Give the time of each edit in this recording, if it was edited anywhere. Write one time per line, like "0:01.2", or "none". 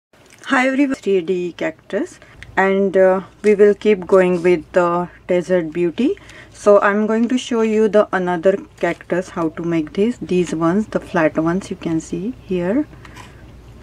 0:00.9